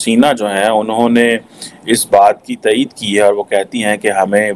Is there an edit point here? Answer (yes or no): no